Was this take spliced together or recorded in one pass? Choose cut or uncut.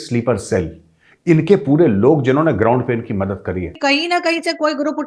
cut